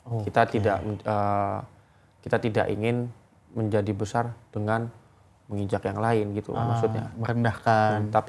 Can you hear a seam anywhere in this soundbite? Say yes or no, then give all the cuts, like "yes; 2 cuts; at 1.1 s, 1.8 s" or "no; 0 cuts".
no; 0 cuts